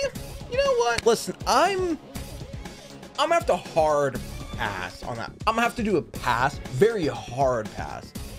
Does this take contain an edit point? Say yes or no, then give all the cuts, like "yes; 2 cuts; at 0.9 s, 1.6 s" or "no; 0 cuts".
yes; 2 cuts; at 1.0 s, 5.3 s